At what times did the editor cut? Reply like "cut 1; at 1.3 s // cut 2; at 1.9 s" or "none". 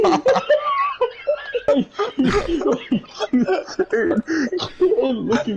cut 1; at 1.7 s